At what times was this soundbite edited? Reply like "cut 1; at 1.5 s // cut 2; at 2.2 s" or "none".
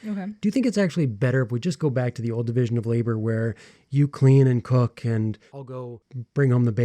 cut 1; at 5.7 s